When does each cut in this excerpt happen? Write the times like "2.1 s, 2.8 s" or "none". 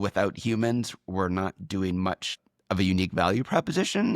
2.3 s